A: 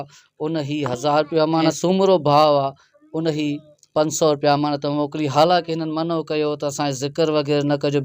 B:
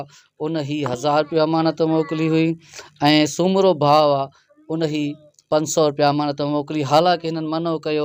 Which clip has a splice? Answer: A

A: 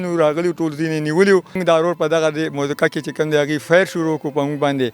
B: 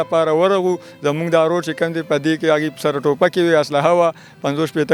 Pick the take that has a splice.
A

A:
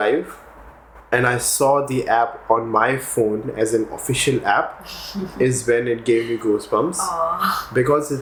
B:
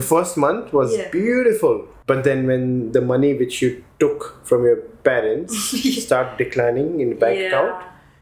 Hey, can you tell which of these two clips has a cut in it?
B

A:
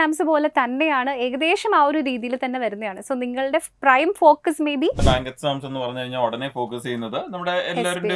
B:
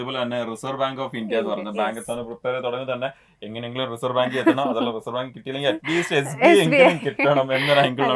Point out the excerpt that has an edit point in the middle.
A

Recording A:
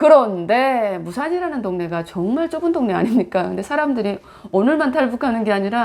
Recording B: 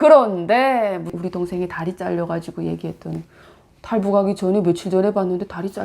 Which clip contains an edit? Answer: B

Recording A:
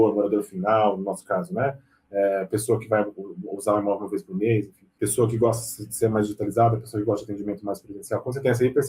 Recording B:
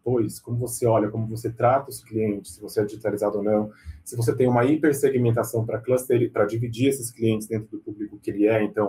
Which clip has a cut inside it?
A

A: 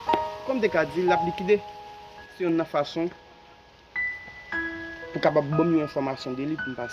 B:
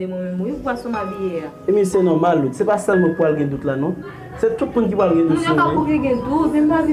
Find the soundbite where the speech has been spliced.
A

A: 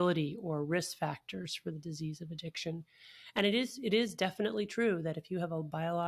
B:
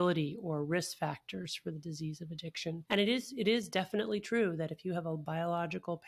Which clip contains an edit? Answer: B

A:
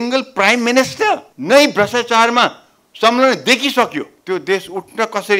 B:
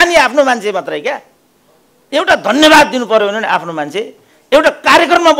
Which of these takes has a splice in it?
A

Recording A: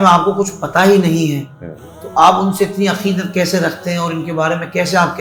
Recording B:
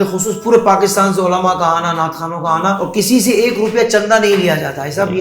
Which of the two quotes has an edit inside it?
B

